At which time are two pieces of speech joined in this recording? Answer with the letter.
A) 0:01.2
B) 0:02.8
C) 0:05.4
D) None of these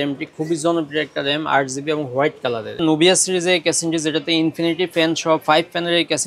B